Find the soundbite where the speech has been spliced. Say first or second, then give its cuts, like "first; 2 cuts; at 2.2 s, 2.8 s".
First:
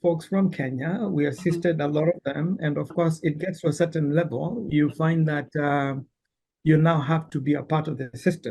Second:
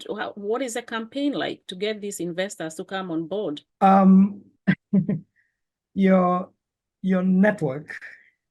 second; 2 cuts; at 3.7 s, 4.5 s